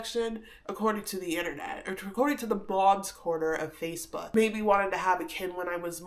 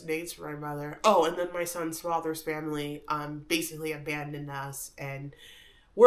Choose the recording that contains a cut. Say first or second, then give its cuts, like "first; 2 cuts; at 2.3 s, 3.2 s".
first; 1 cut; at 4.1 s